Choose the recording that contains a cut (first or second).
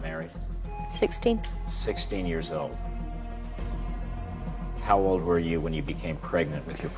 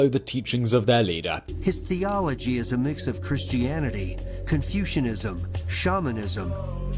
second